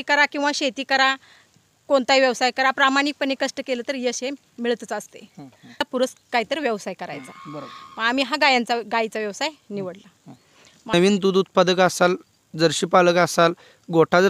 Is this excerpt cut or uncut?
cut